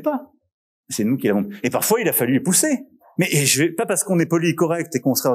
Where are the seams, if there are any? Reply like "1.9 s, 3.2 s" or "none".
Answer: 3.0 s